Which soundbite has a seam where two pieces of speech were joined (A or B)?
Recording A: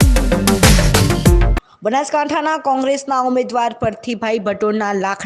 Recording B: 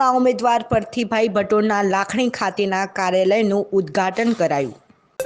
A